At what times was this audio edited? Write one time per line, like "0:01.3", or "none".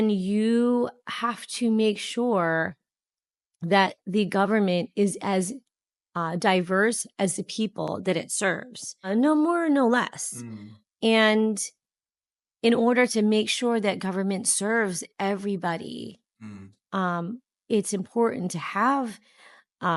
0:09.1